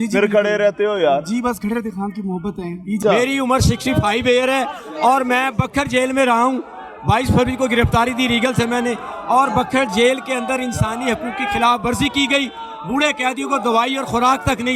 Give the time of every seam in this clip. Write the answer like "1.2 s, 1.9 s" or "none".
3.0 s